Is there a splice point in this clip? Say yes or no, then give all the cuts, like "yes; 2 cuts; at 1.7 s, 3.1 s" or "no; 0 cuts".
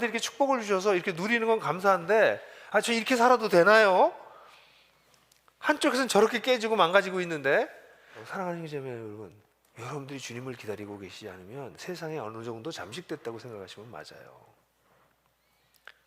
yes; 1 cut; at 8.2 s